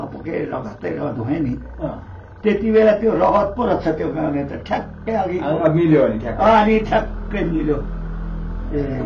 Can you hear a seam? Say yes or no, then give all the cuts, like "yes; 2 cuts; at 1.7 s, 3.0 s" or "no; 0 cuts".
no; 0 cuts